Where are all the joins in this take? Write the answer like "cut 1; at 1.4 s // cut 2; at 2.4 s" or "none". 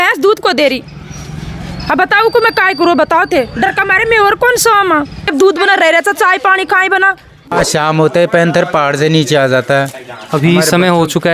none